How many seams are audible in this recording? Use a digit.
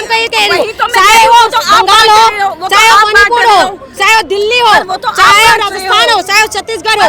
0